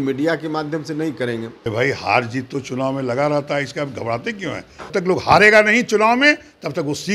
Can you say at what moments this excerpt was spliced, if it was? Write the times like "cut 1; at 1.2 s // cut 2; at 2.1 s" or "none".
cut 1; at 1.5 s // cut 2; at 4.9 s